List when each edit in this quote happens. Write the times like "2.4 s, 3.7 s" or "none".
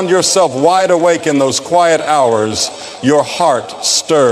1.2 s